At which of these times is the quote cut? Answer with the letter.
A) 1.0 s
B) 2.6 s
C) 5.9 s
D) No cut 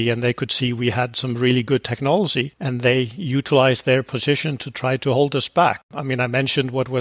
C